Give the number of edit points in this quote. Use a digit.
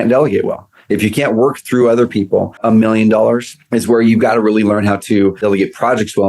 3